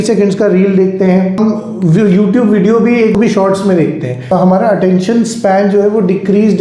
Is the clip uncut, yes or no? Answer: no